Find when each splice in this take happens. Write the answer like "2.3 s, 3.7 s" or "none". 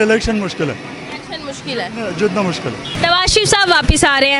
2.9 s